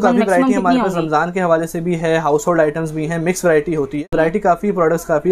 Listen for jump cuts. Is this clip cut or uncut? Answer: uncut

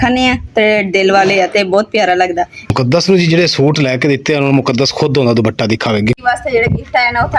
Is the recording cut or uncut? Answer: cut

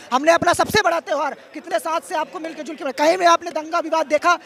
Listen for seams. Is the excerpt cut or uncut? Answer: uncut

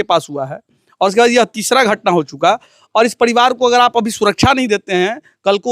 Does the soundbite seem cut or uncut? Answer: uncut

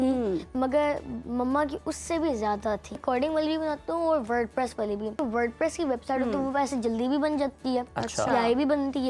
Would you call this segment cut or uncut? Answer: cut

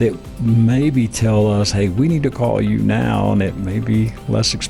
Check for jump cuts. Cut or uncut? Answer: uncut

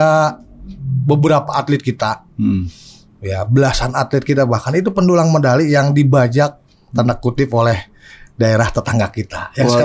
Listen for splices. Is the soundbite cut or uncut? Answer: uncut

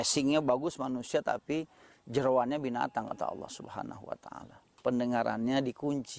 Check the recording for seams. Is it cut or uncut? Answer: cut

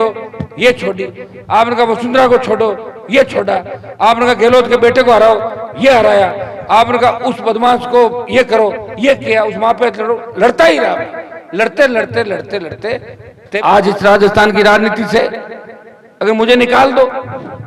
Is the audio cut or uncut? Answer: cut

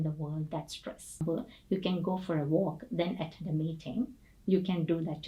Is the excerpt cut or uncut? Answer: cut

